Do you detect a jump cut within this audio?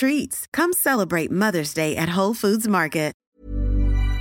yes; 1 cut; at 3.2 s

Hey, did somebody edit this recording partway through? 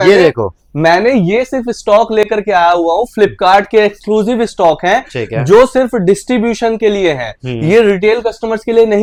no; 0 cuts

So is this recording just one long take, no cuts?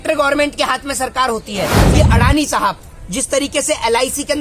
no; 1 cut; at 1.8 s

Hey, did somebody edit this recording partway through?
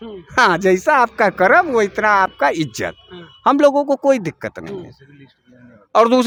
no; 0 cuts

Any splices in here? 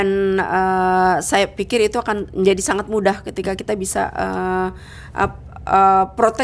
no; 0 cuts

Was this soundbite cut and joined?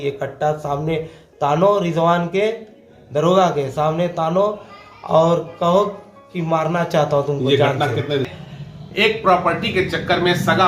yes; 1 cut; at 8.3 s

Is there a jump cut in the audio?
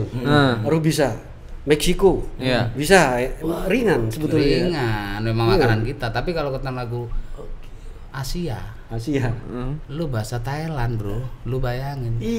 no; 0 cuts

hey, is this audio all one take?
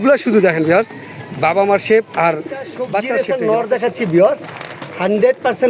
no; 1 cut; at 3.1 s

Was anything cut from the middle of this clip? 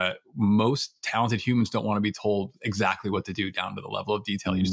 no; 0 cuts

